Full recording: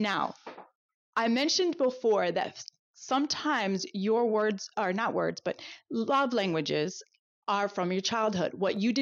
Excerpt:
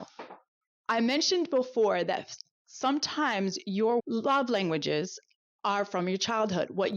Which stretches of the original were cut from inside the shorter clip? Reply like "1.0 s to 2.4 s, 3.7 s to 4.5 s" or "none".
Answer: 4.3 s to 5.8 s